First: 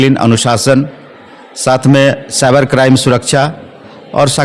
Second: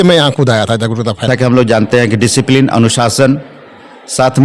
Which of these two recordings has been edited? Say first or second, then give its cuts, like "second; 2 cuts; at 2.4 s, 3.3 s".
second; 1 cut; at 1.2 s